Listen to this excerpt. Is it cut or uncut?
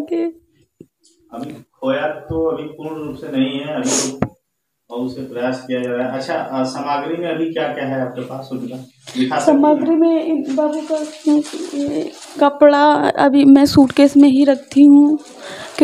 uncut